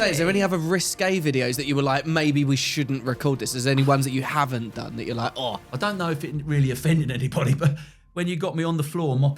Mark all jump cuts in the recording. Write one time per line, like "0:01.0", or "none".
0:05.7

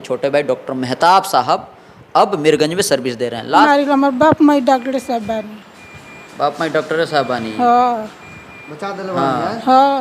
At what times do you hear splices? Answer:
0:03.7

